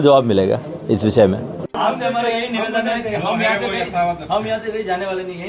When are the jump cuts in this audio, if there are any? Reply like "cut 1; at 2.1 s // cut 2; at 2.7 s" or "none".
cut 1; at 1.6 s